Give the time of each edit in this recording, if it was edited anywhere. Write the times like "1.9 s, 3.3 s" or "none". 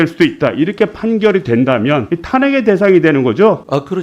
2.1 s